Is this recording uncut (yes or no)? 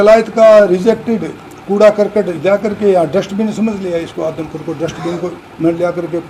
yes